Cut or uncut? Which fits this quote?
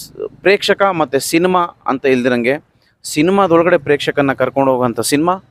uncut